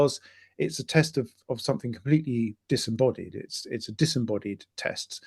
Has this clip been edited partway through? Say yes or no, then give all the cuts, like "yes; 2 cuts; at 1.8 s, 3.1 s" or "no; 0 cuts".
no; 0 cuts